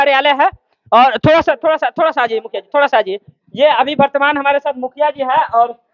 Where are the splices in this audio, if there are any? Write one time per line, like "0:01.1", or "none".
none

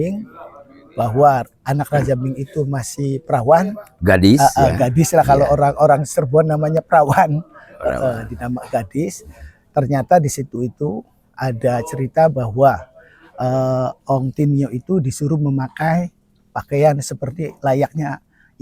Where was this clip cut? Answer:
none

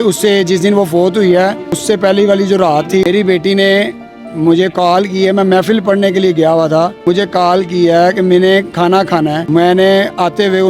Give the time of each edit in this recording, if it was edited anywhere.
0:01.7
0:03.1
0:07.0
0:09.4

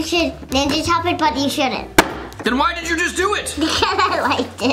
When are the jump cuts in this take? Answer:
0:02.2

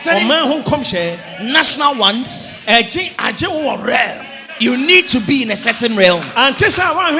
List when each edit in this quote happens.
none

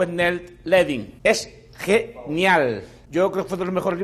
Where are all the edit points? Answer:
0:01.1
0:02.9

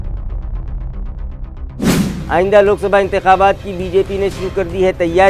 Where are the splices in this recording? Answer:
0:01.9

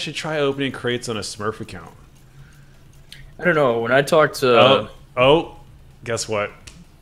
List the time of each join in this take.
none

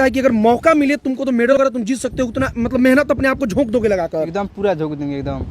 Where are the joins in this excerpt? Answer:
0:01.6

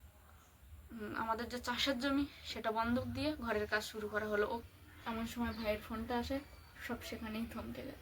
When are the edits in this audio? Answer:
0:04.6

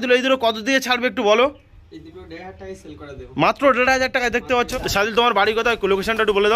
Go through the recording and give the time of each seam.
0:04.7

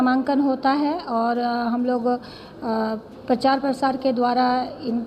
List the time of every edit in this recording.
none

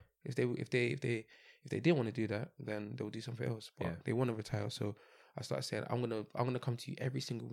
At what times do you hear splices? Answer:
none

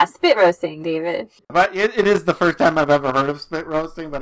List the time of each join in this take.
0:01.4

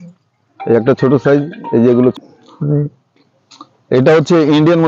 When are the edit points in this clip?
0:02.2

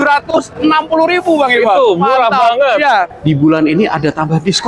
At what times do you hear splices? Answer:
0:03.1

